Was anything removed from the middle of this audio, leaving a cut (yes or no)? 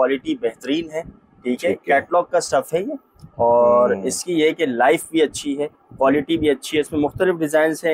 no